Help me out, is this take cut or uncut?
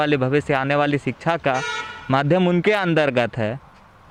uncut